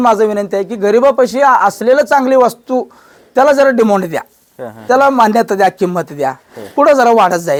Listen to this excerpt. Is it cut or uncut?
uncut